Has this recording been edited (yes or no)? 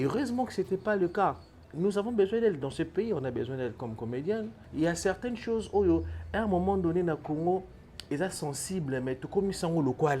yes